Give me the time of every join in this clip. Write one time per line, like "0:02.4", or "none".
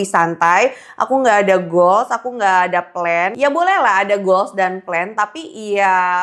none

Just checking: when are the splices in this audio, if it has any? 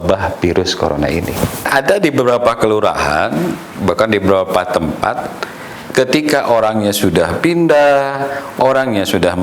0:01.7

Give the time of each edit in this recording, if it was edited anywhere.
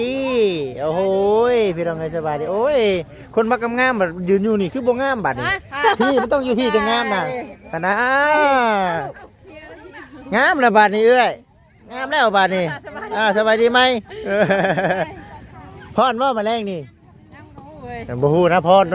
none

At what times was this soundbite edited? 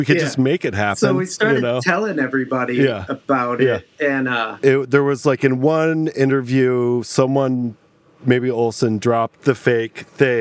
0:04.5
0:09.4

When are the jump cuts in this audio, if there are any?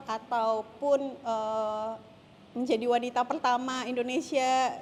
none

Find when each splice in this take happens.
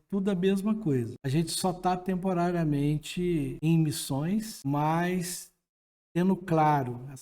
0:01.2
0:03.5
0:04.5

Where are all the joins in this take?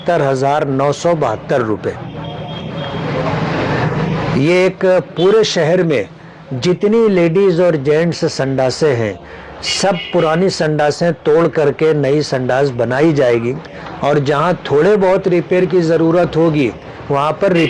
none

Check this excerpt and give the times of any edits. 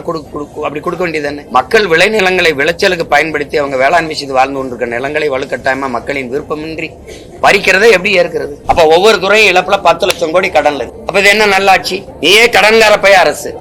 0:01.4
0:08.5

